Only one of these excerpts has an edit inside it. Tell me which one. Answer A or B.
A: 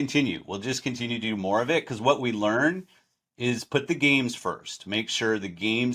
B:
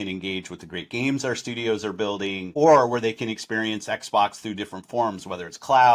A